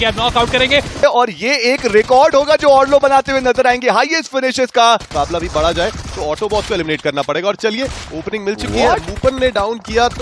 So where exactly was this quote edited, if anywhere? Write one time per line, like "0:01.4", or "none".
0:01.0
0:05.1